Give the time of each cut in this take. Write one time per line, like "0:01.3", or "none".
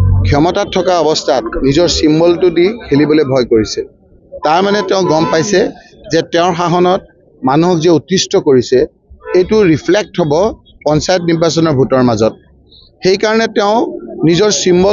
none